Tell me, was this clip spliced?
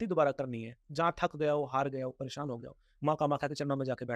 no; 0 cuts

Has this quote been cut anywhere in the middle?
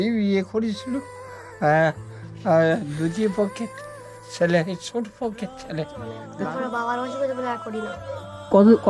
yes; 1 cut; at 6.3 s

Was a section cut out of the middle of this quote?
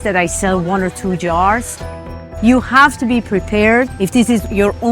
yes; 1 cut; at 1.8 s

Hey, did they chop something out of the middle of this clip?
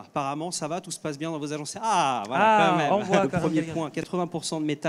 yes; 1 cut; at 3.3 s

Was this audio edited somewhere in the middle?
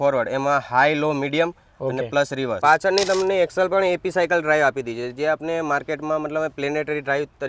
yes; 1 cut; at 2.6 s

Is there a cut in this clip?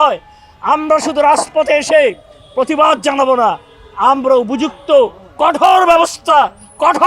no; 0 cuts

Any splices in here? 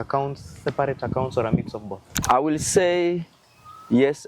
yes; 1 cut; at 2.2 s

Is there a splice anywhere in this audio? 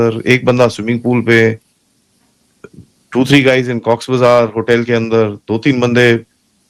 no; 0 cuts

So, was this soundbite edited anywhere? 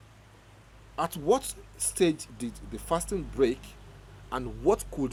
no; 0 cuts

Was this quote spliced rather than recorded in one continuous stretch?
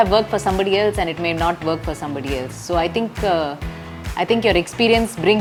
no; 0 cuts

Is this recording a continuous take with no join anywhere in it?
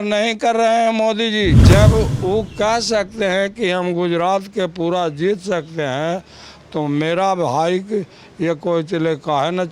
no; 1 cut; at 1.6 s

